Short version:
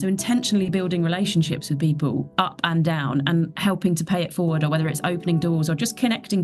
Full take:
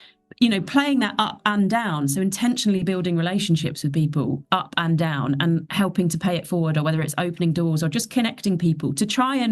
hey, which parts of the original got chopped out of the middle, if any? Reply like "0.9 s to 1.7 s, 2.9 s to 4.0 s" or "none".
none